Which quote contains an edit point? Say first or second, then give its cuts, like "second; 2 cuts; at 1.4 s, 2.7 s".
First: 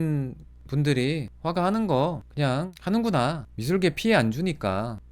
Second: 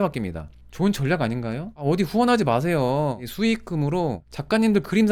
first; 1 cut; at 3.5 s